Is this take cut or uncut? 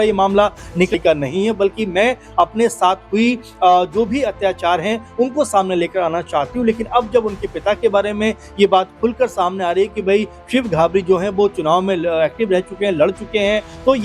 cut